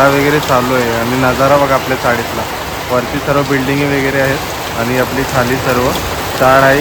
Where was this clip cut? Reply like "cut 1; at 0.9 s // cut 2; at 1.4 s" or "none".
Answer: none